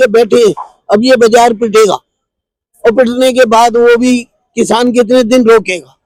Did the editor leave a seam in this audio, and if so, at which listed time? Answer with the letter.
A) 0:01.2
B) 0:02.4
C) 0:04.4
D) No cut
D